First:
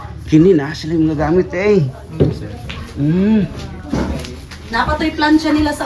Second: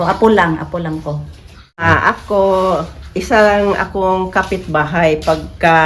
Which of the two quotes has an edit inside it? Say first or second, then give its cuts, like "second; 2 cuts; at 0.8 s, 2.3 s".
second; 1 cut; at 1.8 s